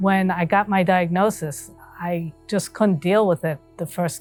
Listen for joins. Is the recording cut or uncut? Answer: uncut